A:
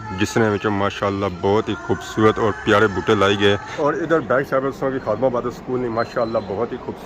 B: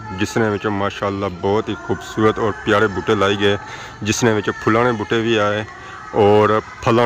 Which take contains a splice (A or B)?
A